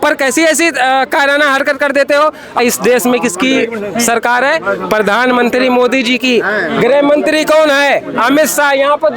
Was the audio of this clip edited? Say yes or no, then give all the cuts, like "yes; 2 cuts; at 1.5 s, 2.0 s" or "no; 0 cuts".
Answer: yes; 1 cut; at 2.6 s